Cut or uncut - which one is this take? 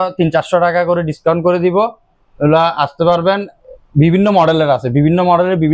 uncut